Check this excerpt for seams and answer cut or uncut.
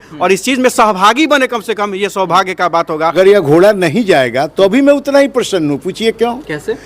cut